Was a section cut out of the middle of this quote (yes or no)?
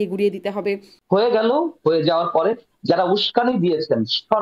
yes